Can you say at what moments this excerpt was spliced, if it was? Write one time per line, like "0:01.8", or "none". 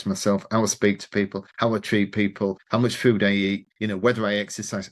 0:01.4
0:02.6
0:03.7